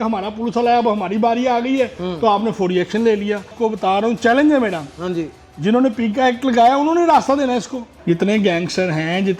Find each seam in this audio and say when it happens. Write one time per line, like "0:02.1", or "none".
0:03.5
0:07.9